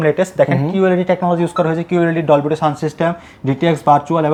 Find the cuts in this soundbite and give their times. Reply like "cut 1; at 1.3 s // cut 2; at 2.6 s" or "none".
none